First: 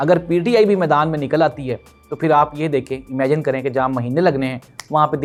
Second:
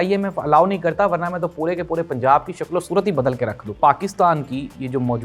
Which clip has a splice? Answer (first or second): second